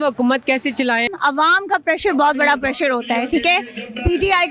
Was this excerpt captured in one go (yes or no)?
no